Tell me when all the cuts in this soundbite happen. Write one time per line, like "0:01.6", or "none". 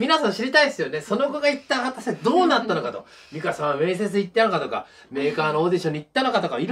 none